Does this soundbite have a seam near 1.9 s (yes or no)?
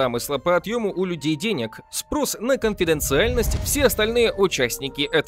no